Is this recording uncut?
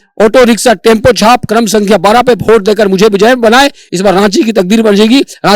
yes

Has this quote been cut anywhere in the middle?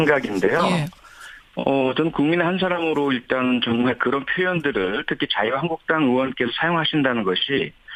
no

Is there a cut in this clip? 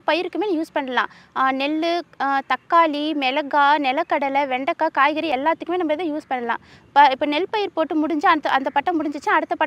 no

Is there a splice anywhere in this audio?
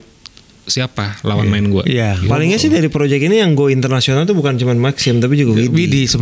yes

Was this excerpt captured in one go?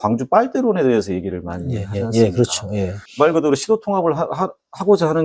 no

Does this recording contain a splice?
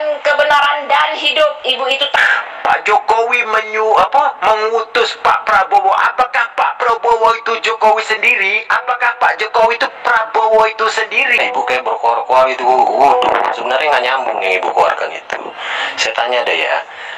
yes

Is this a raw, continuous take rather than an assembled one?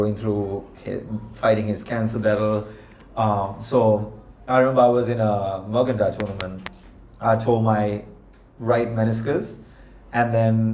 yes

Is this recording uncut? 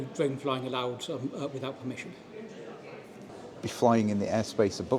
no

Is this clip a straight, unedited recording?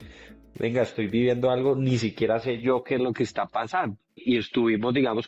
no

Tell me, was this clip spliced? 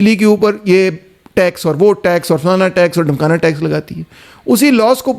no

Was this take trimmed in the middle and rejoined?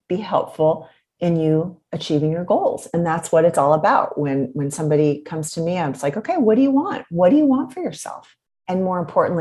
no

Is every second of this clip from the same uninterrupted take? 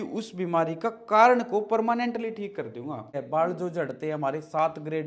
no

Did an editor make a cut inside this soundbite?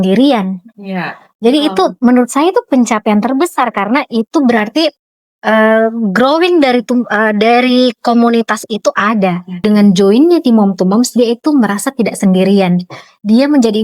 yes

